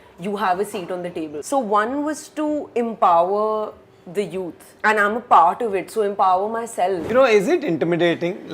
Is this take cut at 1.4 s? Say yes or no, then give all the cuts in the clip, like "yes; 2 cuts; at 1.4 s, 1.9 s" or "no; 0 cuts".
yes; 3 cuts; at 1.4 s, 4.7 s, 7.0 s